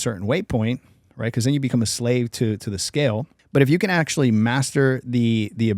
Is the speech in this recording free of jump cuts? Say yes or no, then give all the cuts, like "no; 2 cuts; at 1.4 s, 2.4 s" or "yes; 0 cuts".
no; 1 cut; at 3.4 s